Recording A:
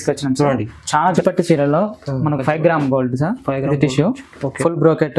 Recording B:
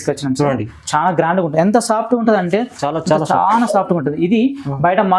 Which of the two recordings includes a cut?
A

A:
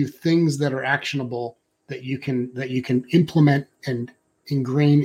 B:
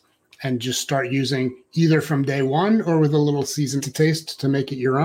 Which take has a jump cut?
B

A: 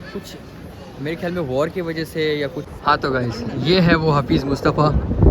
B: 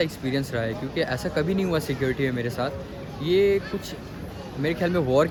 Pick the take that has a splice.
A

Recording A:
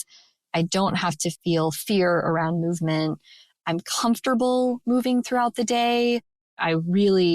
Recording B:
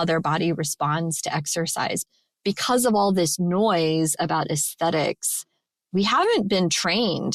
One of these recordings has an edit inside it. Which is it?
A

